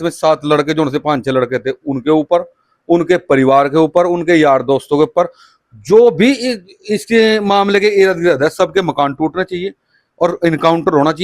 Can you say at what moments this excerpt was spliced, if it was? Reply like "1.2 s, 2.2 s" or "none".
none